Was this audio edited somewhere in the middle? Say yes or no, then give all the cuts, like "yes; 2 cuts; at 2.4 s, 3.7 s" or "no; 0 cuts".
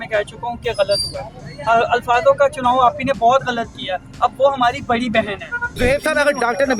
yes; 1 cut; at 5.6 s